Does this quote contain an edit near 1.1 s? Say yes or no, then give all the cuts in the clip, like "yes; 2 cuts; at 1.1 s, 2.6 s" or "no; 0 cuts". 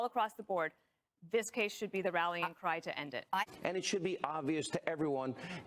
no; 1 cut; at 3.5 s